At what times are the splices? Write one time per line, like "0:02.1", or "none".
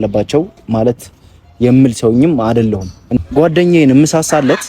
0:03.0